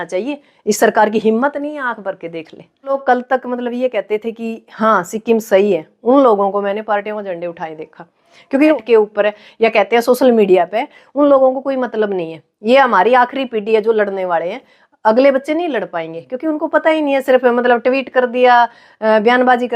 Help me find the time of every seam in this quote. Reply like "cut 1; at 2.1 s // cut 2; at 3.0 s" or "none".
cut 1; at 2.9 s // cut 2; at 8.7 s